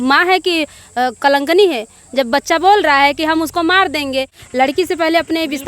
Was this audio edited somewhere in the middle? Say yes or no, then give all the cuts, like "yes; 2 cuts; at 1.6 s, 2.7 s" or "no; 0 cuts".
yes; 1 cut; at 4.4 s